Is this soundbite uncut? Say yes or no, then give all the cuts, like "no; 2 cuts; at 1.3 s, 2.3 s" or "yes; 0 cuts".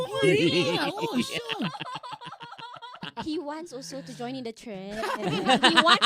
no; 1 cut; at 3.1 s